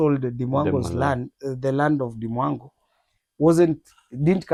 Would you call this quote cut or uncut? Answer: uncut